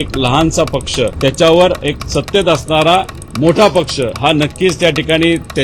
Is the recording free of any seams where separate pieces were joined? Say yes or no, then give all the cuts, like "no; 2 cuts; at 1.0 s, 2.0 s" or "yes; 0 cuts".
no; 3 cuts; at 1.1 s, 2.0 s, 4.1 s